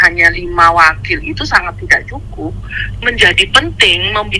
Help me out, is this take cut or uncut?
cut